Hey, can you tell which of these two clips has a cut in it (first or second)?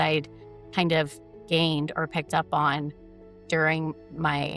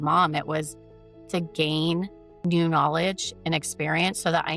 second